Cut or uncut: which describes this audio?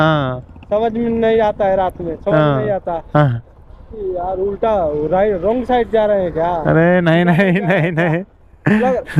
uncut